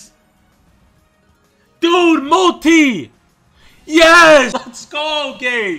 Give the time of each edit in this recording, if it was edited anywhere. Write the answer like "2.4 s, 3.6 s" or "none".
4.5 s